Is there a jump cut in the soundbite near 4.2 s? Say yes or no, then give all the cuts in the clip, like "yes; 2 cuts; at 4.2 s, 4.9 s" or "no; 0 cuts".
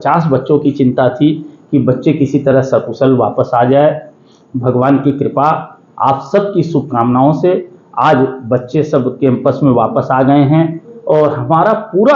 no; 0 cuts